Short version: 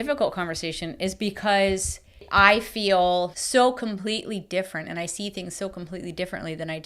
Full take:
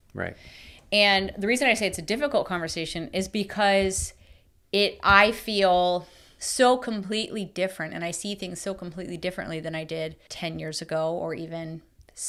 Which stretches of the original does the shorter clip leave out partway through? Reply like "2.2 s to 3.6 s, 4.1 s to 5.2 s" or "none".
4.4 s to 5.0 s, 6.1 s to 6.4 s